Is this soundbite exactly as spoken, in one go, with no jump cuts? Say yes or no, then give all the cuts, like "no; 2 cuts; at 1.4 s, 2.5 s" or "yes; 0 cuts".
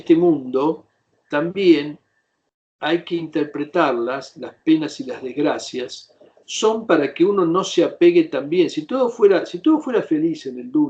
yes; 0 cuts